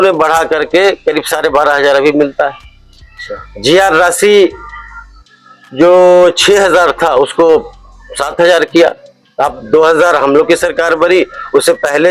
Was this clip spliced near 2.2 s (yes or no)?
no